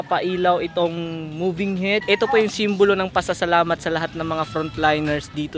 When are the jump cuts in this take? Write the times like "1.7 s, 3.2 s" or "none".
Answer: 2.0 s